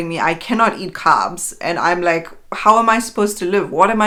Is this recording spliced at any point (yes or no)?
no